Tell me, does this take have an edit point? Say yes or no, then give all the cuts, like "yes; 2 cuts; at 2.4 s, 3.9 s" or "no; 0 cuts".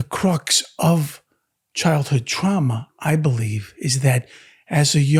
no; 0 cuts